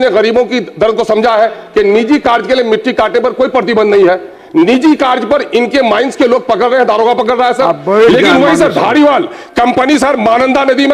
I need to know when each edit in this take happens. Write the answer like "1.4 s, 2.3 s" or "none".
none